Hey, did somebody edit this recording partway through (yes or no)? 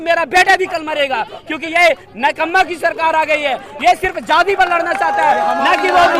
no